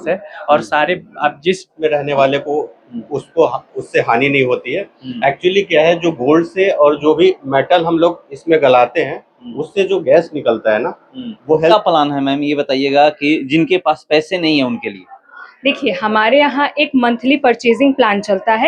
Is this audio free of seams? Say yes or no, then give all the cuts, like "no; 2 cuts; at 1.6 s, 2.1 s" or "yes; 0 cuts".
no; 2 cuts; at 1.7 s, 11.7 s